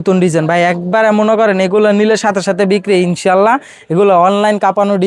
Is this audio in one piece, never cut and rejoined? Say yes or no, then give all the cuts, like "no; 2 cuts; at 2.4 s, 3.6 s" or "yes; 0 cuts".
yes; 0 cuts